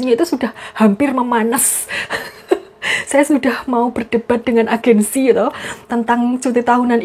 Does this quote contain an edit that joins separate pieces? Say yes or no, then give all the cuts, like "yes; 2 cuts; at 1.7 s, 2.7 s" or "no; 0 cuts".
no; 0 cuts